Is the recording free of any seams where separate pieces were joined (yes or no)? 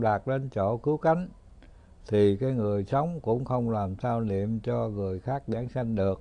yes